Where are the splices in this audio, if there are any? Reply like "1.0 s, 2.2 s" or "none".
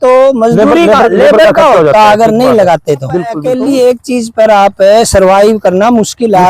3.4 s

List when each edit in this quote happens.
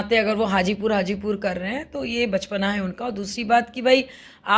none

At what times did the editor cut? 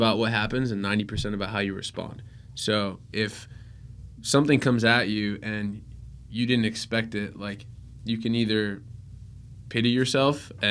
none

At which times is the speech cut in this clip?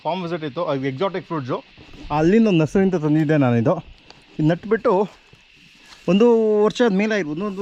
none

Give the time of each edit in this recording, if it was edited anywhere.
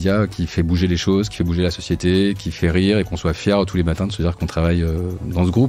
none

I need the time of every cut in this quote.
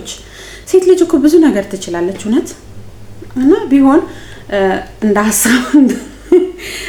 none

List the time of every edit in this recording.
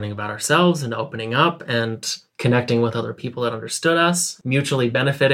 4.3 s

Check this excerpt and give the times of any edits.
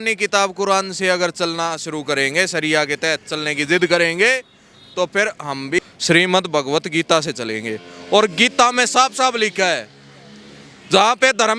5.8 s

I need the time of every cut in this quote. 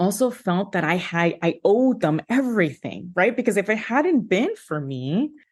none

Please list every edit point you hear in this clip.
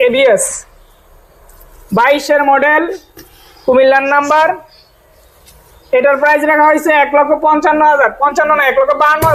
none

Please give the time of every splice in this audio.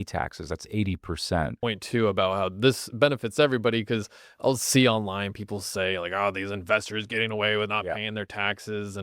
1.6 s

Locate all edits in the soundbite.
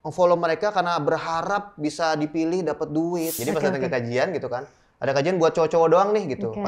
3.4 s

